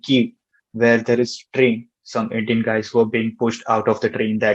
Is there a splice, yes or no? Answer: yes